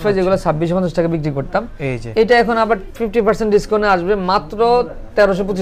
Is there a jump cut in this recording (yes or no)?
no